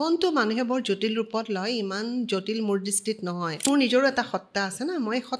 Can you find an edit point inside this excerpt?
yes; 1 cut; at 3.7 s

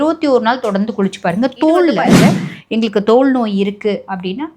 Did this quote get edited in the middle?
yes; 1 cut; at 2.1 s

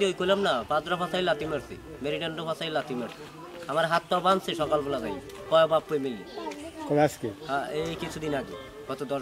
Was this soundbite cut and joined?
no; 0 cuts

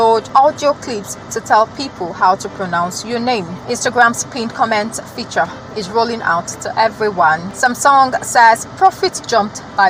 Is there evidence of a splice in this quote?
no; 0 cuts

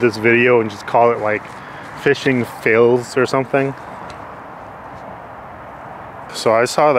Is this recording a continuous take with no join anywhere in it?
yes; 0 cuts

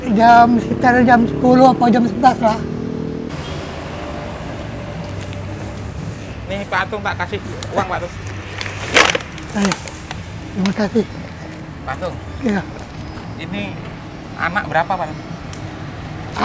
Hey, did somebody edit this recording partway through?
yes; 1 cut; at 3.3 s

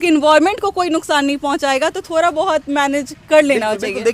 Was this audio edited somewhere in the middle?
no; 0 cuts

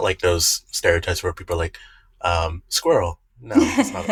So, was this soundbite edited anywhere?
no; 0 cuts

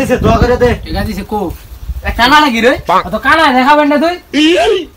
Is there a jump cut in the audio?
no; 0 cuts

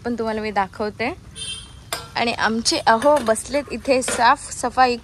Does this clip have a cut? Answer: no; 0 cuts

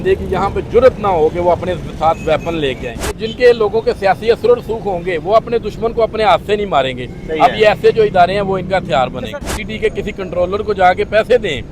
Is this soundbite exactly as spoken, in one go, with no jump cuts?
no; 2 cuts; at 3.2 s, 9.4 s

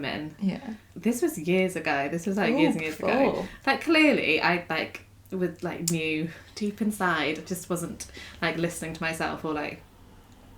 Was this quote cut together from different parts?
yes; 2 cuts; at 0.9 s, 3.5 s

